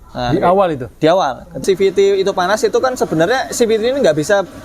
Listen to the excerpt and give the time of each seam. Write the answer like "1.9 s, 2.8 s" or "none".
1.6 s